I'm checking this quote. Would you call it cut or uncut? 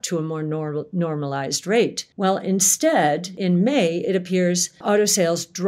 cut